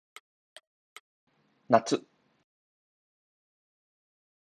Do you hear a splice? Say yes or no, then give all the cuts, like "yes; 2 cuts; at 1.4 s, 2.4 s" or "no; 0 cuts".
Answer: no; 0 cuts